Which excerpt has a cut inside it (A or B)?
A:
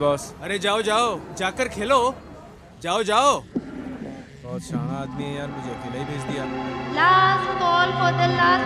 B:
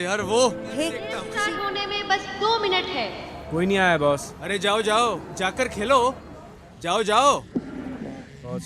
B